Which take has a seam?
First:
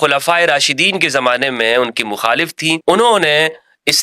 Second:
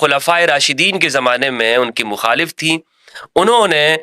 first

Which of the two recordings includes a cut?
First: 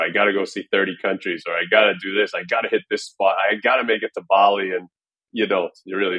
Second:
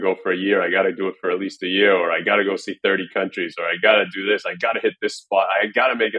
first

